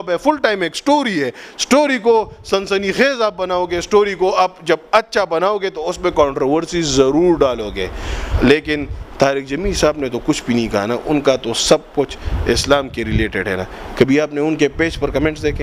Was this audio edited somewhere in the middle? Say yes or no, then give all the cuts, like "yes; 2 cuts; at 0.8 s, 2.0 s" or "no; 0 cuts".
no; 0 cuts